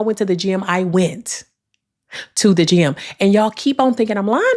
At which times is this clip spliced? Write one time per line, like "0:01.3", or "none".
none